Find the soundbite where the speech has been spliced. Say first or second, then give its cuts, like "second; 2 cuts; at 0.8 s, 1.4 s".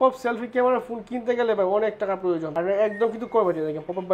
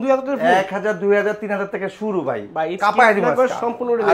second; 1 cut; at 2.8 s